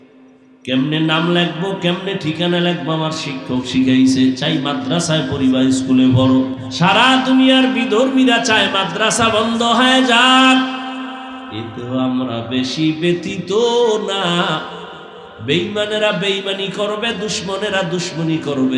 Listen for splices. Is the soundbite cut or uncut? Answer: cut